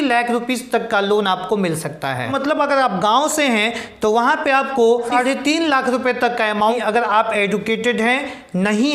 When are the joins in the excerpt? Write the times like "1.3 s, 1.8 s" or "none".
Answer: 2.3 s, 5.1 s, 6.8 s

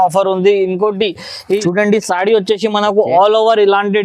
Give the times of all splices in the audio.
1.6 s

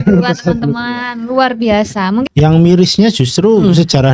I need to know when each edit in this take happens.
2.2 s

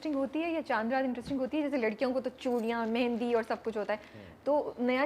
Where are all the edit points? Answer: none

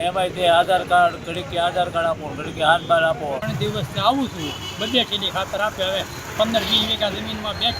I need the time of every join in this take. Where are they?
3.4 s

